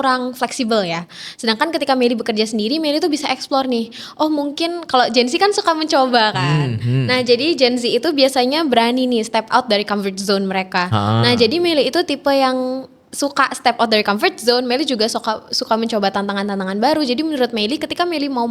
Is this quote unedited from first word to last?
yes; 0 cuts

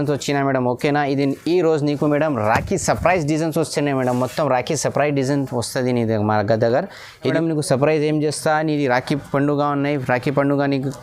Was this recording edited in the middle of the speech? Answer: yes; 1 cut; at 7.3 s

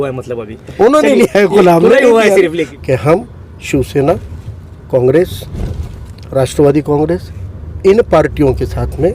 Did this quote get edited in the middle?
yes; 1 cut; at 2.7 s

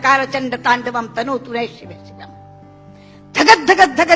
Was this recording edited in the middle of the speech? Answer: yes; 2 cuts; at 1.9 s, 3.1 s

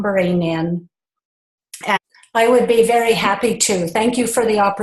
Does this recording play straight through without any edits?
yes; 0 cuts

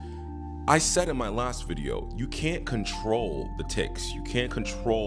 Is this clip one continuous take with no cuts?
yes; 0 cuts

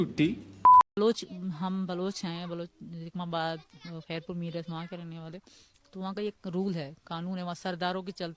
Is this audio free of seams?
no; 1 cut; at 0.9 s

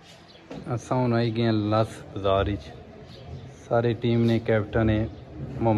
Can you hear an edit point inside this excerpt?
no; 0 cuts

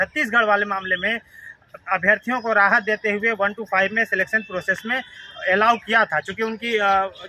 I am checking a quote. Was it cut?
no; 0 cuts

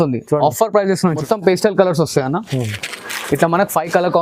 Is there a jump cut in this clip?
yes; 1 cut; at 1.2 s

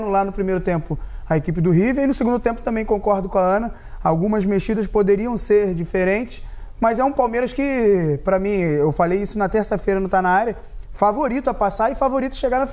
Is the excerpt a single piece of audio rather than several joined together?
yes; 0 cuts

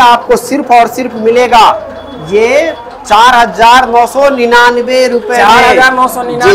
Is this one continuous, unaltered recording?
yes; 0 cuts

